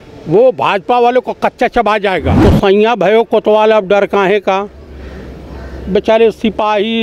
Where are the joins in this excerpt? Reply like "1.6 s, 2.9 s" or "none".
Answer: 2.3 s